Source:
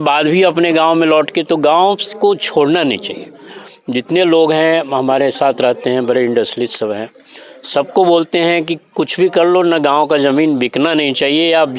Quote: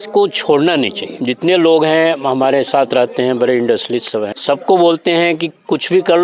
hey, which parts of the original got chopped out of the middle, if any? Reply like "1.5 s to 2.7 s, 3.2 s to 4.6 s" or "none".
3.1 s to 3.7 s, 7.0 s to 7.6 s